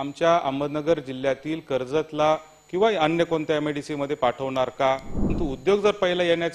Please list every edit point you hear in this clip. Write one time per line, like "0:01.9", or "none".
0:05.3